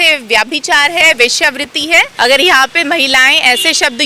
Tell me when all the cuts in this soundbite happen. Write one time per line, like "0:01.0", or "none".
0:02.1